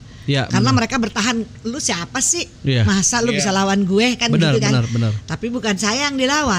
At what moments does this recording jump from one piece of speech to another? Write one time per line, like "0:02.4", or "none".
none